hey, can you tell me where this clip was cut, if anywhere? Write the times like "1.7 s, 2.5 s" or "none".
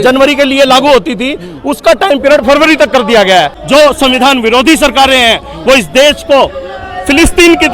3.6 s